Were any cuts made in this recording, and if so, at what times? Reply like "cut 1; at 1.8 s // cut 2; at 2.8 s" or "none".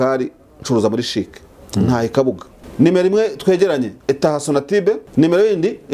cut 1; at 2.6 s // cut 2; at 3.9 s // cut 3; at 5.0 s